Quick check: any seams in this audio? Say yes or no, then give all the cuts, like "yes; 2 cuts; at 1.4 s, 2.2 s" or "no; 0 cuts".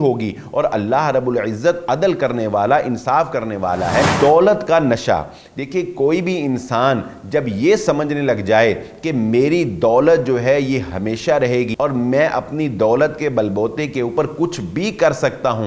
yes; 1 cut; at 4.1 s